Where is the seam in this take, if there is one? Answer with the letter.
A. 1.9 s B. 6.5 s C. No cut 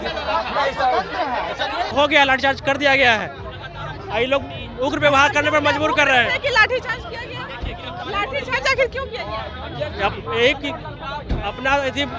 A